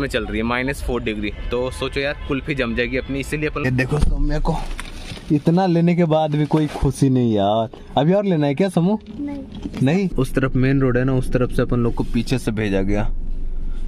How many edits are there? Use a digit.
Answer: 2